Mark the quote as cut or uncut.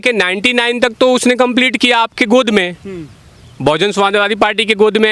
uncut